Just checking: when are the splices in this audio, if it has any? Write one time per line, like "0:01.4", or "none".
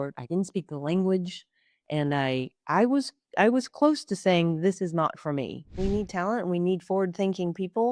0:05.7

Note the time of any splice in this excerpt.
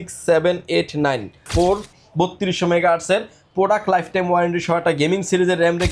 0:01.5

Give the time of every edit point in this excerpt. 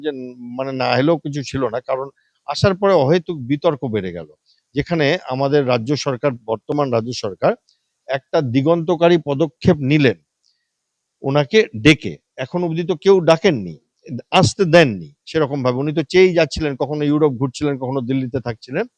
none

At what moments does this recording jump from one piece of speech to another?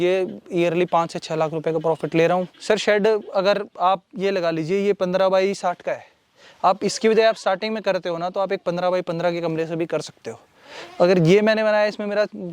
0:02.5

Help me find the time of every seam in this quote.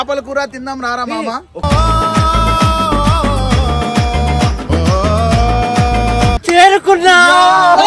0:06.4

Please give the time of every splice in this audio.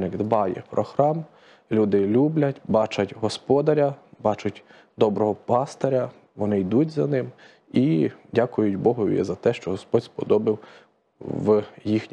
none

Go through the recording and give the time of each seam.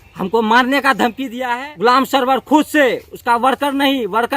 0:01.3

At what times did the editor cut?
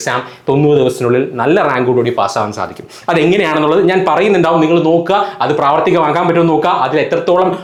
none

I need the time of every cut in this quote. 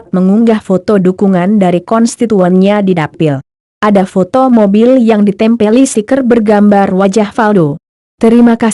none

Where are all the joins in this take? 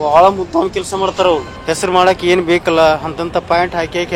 0:01.5

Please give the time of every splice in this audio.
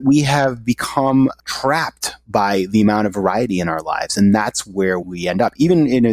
0:01.4
0:05.1

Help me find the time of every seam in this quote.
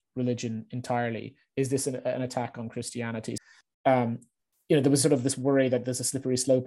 0:03.4

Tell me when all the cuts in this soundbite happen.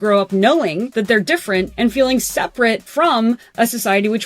0:00.9
0:01.7
0:02.9

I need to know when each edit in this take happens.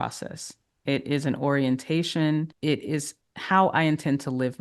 0:02.5

